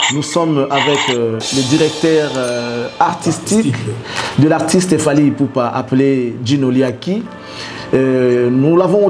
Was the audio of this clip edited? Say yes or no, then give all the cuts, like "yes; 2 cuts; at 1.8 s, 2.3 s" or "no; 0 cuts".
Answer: no; 0 cuts